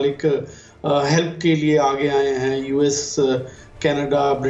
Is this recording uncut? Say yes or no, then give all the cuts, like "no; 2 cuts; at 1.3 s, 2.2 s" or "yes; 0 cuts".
yes; 0 cuts